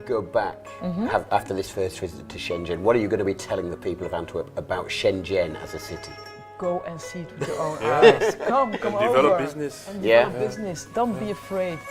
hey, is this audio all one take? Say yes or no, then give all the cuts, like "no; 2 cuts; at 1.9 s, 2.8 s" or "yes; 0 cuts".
yes; 0 cuts